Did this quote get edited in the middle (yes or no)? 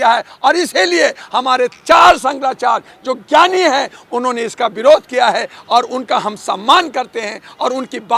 no